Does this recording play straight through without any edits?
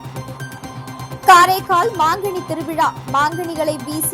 no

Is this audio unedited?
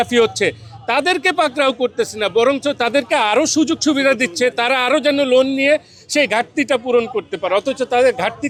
yes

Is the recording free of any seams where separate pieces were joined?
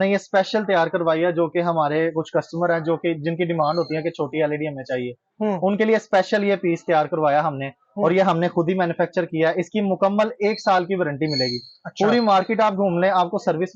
yes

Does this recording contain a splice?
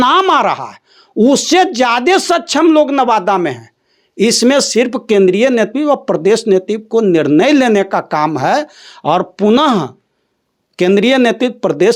no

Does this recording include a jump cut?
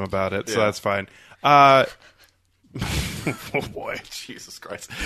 no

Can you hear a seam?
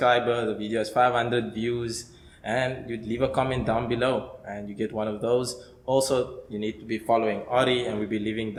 no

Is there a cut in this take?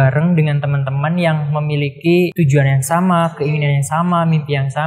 yes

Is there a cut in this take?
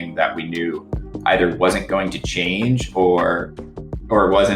no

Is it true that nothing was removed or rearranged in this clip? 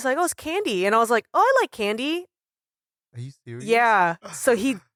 yes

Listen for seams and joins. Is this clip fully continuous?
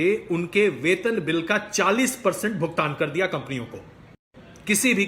yes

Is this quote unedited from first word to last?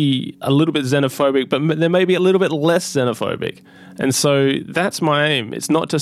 yes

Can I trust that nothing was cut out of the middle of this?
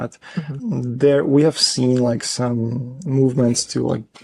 yes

